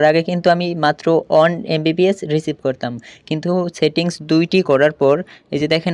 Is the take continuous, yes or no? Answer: yes